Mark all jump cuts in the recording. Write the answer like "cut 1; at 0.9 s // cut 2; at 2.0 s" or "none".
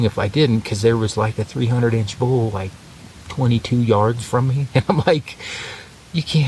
none